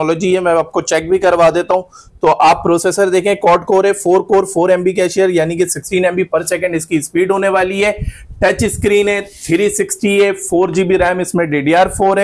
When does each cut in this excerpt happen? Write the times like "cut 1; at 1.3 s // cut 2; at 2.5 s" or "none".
none